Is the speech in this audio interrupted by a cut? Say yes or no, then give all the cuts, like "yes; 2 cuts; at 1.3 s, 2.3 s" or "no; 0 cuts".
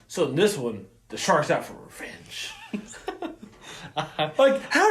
no; 0 cuts